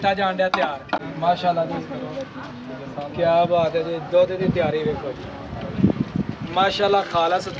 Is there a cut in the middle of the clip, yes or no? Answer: no